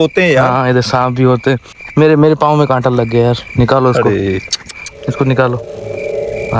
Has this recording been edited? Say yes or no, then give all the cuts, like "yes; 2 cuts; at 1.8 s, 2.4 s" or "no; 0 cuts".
no; 0 cuts